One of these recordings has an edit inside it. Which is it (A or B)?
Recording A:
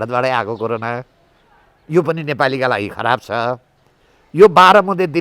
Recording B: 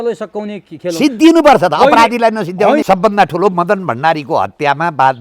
B